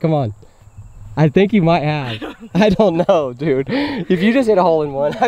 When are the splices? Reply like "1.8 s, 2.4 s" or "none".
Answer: none